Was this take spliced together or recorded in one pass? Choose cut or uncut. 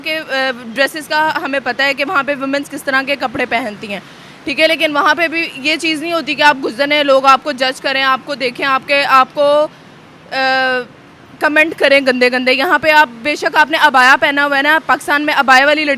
uncut